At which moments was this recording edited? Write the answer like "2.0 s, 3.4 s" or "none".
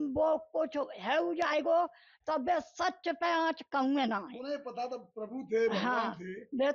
none